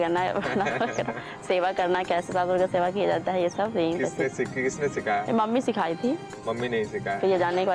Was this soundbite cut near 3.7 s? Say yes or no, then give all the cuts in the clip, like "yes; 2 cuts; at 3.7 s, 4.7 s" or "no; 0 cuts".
no; 0 cuts